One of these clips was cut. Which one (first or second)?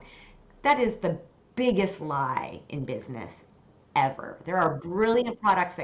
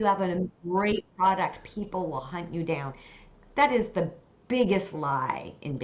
second